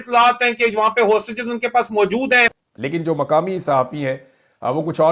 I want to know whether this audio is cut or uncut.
uncut